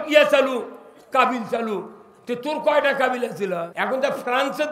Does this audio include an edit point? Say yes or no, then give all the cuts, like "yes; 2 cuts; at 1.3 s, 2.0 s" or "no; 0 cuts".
yes; 1 cut; at 3.7 s